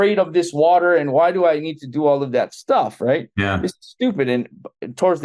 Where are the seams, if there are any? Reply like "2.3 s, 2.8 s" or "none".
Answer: none